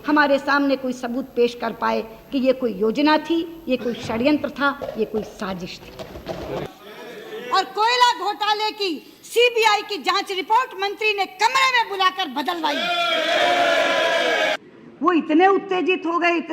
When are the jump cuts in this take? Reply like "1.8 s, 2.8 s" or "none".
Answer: 6.6 s, 14.6 s